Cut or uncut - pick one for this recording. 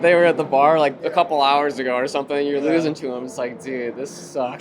cut